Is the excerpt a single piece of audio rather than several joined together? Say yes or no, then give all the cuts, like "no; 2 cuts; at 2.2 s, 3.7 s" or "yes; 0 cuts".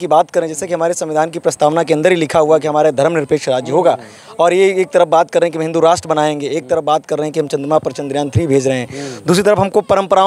yes; 0 cuts